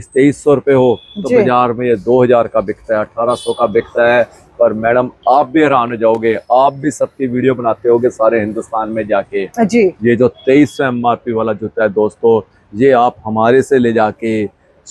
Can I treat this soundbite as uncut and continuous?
yes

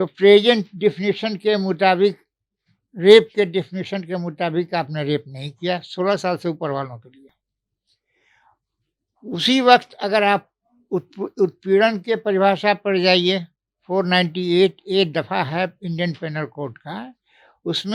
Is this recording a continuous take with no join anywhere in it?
yes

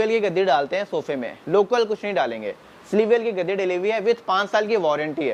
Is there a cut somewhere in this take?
no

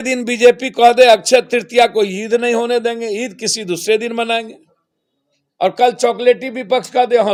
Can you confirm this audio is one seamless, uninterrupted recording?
yes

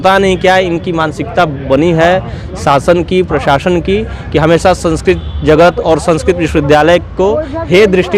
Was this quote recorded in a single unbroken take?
yes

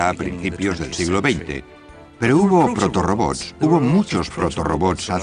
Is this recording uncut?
yes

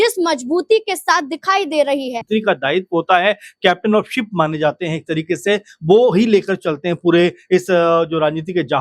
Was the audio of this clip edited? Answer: yes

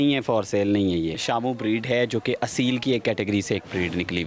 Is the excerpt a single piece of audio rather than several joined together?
no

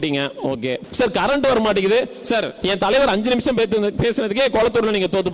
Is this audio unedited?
no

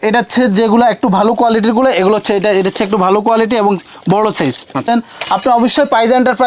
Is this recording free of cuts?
no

